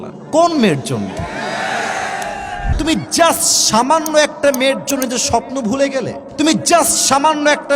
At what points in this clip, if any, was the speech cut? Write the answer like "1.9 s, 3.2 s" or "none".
2.7 s, 6.2 s